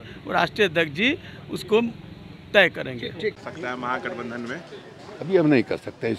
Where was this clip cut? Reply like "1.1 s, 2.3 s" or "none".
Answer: none